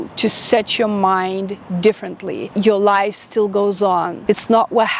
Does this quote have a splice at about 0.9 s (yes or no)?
no